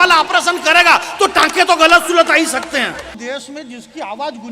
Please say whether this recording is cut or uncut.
cut